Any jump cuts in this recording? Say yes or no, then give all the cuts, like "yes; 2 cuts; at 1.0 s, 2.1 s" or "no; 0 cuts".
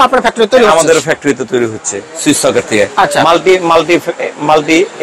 no; 0 cuts